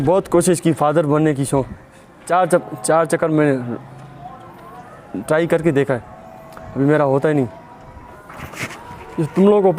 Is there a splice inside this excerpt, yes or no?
yes